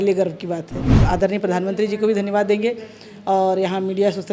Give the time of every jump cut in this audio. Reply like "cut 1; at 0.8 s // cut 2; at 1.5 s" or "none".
cut 1; at 0.9 s